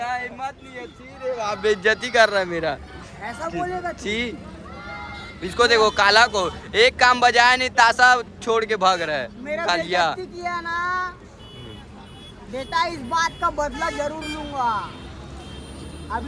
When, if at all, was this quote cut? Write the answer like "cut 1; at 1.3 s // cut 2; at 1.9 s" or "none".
none